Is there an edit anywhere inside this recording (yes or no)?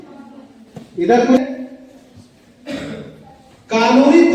yes